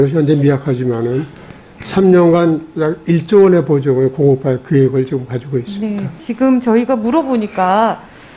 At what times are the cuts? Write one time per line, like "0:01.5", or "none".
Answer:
0:06.2